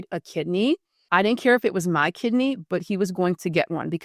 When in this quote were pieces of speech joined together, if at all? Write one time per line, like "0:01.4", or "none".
0:00.9

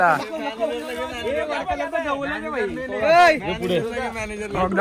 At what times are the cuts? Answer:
none

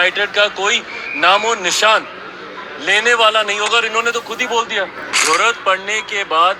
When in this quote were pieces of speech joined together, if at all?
0:05.1

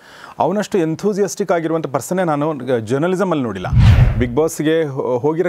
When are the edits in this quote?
0:03.8

